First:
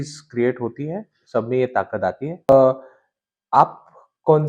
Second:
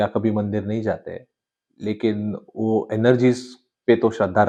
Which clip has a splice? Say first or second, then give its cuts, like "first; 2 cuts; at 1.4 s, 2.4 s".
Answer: first; 1 cut; at 2.5 s